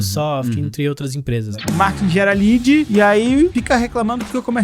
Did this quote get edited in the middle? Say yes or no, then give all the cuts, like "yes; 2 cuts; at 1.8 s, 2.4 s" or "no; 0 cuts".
yes; 3 cuts; at 1.4 s, 2.9 s, 3.5 s